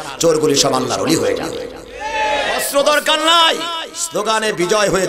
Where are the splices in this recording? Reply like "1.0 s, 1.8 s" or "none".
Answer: 2.5 s